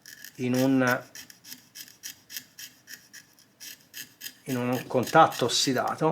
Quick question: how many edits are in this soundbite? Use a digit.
1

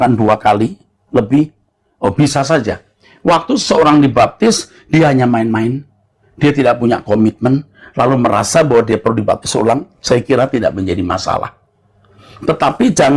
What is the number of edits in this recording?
0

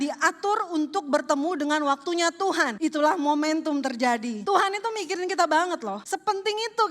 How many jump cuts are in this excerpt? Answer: 3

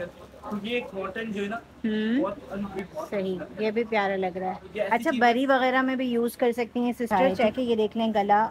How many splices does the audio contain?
2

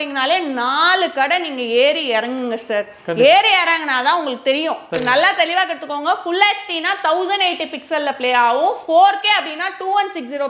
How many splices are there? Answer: 1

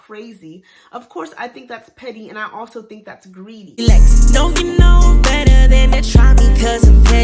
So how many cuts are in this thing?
1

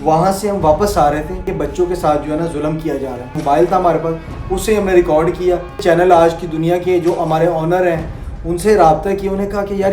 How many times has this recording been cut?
3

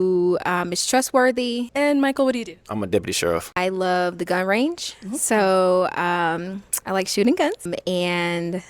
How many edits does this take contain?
3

